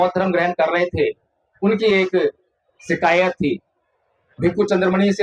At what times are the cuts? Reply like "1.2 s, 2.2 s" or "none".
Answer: none

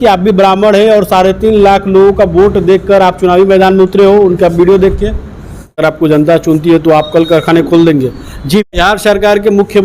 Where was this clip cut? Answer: 5.8 s, 8.7 s

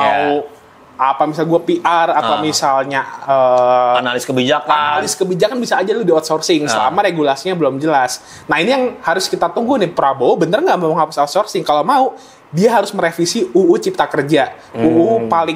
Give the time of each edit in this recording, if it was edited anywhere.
none

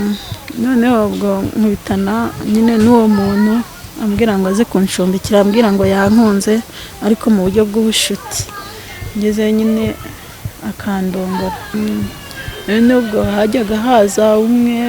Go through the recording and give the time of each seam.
11.7 s

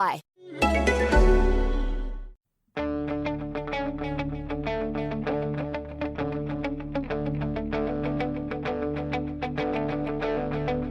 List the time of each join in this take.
2.9 s

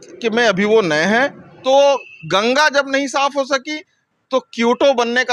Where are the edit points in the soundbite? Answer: 1.5 s

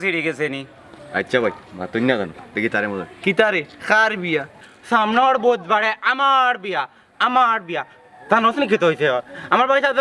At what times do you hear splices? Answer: 4.6 s

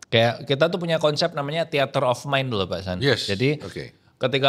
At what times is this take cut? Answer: none

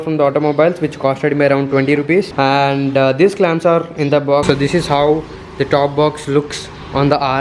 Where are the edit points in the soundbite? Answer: 4.4 s

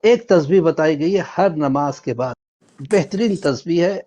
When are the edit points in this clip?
2.4 s

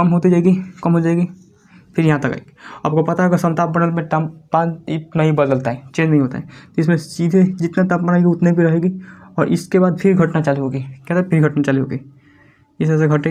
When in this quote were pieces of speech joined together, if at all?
none

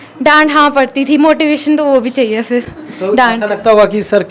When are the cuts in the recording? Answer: none

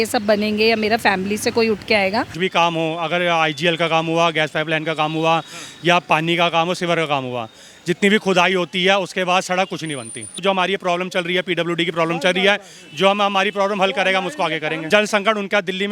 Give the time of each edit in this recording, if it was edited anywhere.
2.3 s, 10.4 s, 14.9 s

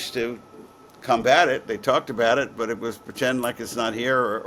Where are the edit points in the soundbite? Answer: none

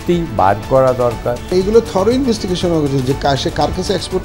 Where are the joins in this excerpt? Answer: 1.5 s

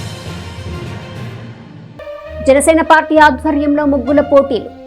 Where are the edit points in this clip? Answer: 1.7 s

